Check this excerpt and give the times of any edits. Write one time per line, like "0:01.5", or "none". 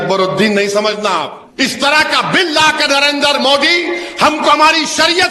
0:01.4